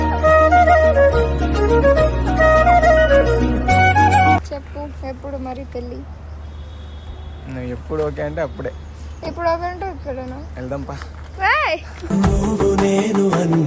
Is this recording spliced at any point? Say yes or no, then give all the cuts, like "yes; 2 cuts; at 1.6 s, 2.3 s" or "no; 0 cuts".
yes; 1 cut; at 4.4 s